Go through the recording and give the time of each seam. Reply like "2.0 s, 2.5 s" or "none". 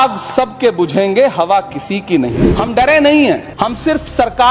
2.3 s, 3.5 s